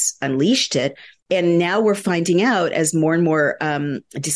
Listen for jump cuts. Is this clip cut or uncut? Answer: cut